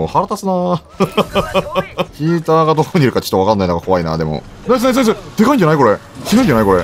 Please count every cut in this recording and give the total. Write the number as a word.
two